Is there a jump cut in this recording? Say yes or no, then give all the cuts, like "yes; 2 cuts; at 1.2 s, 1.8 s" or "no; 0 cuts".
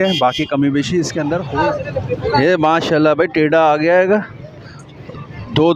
yes; 1 cut; at 1.5 s